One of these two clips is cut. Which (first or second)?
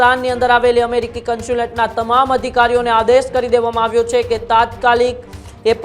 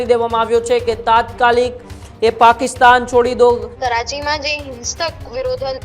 second